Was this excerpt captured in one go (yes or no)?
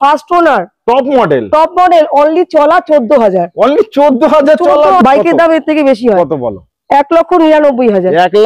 no